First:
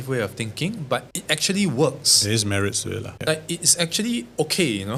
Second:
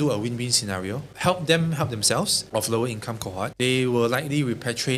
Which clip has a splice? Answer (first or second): second